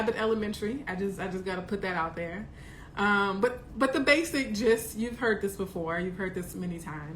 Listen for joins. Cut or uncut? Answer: uncut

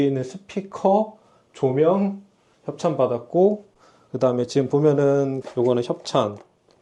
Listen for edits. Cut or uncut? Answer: uncut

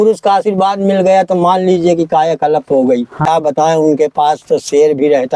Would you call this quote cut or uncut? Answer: cut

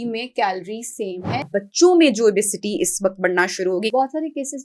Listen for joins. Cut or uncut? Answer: cut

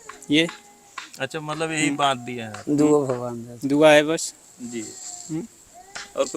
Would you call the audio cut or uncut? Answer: uncut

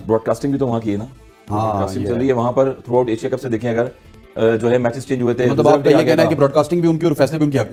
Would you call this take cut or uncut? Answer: uncut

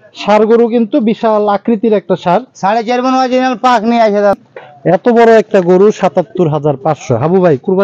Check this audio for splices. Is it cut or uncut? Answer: cut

